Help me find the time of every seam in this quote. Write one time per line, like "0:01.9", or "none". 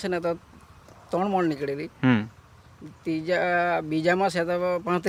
none